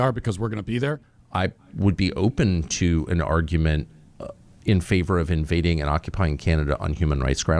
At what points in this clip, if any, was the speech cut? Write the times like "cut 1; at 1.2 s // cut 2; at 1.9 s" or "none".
cut 1; at 1.1 s

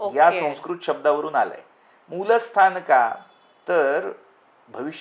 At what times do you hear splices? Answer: none

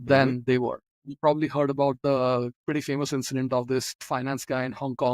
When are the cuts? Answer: cut 1; at 2.6 s // cut 2; at 4.0 s

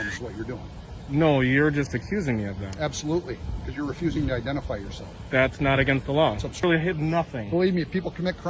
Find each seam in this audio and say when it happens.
cut 1; at 6.6 s

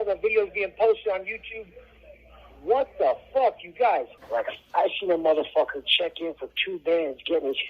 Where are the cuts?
cut 1; at 4.2 s

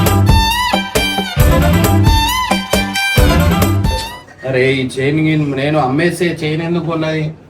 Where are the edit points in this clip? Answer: cut 1; at 3.9 s

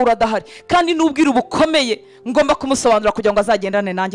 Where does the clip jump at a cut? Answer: none

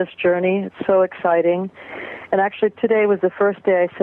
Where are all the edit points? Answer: cut 1; at 2.0 s

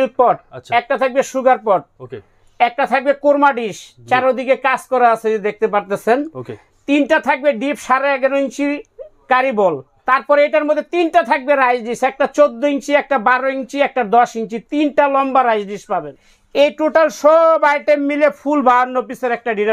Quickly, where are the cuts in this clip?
cut 1; at 9.9 s // cut 2; at 16.0 s

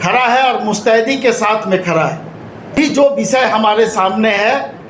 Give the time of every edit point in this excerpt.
cut 1; at 2.8 s

